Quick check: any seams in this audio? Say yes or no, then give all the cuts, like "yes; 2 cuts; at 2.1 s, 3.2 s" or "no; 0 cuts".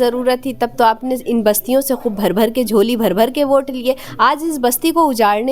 no; 0 cuts